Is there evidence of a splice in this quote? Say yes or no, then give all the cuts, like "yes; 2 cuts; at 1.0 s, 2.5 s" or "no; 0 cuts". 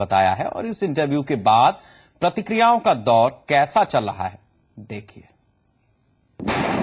yes; 1 cut; at 2.2 s